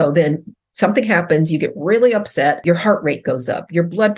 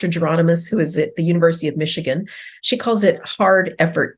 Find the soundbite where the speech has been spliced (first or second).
first